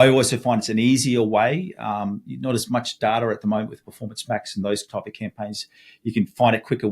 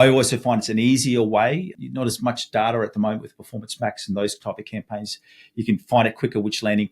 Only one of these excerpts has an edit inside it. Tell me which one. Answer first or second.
second